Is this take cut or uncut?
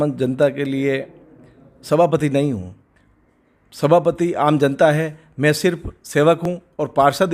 uncut